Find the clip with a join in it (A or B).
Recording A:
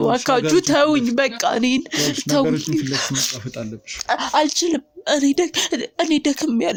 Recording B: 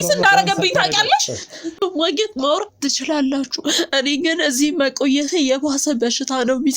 B